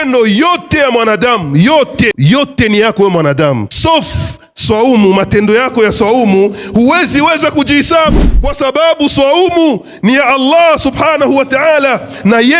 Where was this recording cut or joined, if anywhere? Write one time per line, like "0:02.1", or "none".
0:02.1
0:03.7
0:08.1